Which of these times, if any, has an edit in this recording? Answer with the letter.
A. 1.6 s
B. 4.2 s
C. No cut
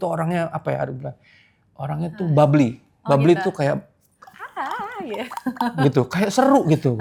C